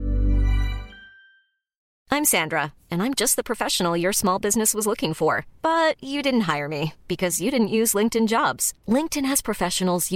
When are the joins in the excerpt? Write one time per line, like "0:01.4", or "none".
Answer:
0:01.8